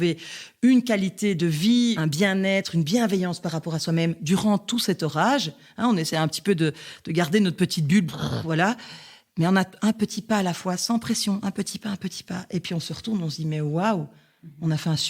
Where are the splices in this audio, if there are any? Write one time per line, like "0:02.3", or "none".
0:02.0